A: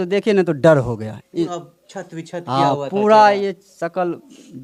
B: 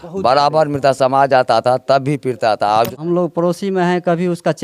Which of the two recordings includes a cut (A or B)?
B